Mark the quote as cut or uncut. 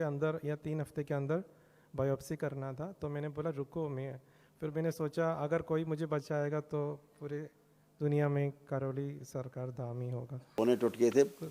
cut